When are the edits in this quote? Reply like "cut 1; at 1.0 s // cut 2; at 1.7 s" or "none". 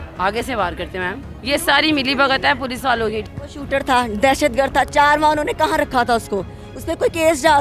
cut 1; at 1.3 s // cut 2; at 3.3 s

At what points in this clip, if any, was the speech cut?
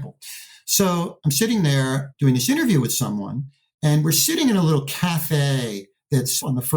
none

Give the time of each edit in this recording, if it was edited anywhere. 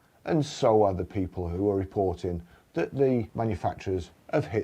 cut 1; at 3.3 s

